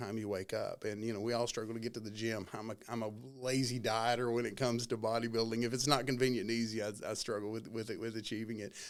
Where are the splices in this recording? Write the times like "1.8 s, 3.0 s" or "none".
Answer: none

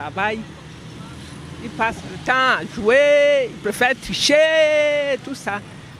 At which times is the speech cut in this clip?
none

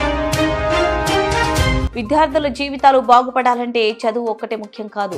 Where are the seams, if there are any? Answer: 1.8 s

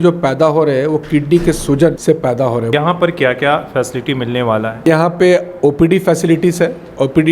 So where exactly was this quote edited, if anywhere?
2.5 s, 4.8 s

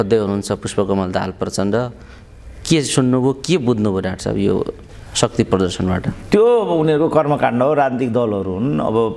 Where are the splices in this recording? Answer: none

